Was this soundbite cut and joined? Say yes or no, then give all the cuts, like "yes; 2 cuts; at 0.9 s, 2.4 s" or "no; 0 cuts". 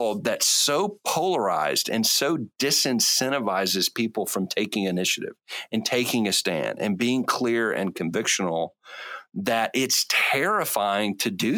no; 0 cuts